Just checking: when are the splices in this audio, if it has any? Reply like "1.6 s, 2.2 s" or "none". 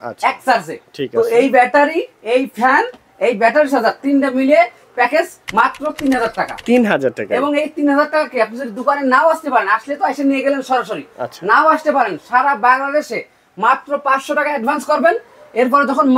none

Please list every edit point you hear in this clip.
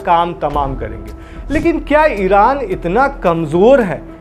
none

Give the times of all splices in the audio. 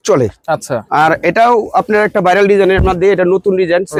none

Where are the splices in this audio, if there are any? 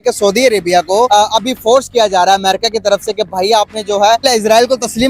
1.1 s, 4.2 s

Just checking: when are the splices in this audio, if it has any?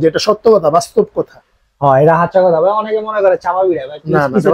none

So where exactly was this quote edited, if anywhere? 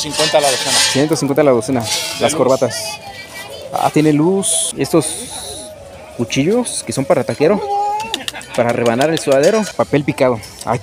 4.6 s, 9.7 s

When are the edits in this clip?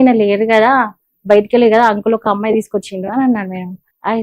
none

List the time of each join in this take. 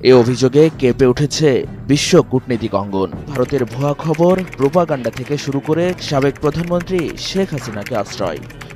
3.3 s

